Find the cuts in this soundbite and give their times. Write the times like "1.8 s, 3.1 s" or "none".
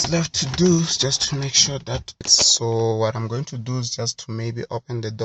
2.3 s